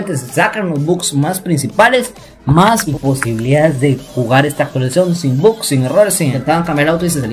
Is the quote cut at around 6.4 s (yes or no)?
yes